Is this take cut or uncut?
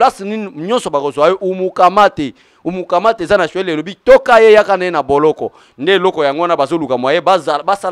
uncut